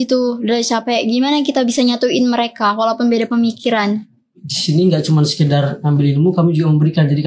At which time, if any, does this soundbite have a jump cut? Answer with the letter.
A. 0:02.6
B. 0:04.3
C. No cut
B